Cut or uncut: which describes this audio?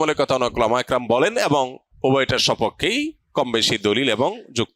cut